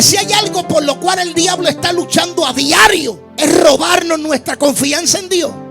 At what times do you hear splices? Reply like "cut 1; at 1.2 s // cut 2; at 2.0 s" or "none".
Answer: cut 1; at 3.2 s